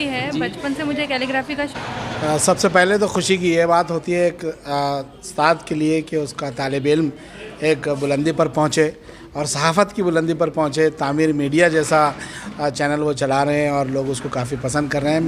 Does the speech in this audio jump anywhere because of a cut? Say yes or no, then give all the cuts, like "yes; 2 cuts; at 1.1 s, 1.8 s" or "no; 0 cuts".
yes; 1 cut; at 1.7 s